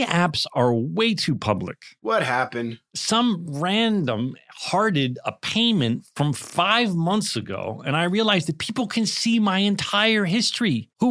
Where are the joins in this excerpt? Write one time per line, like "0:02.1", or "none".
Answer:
none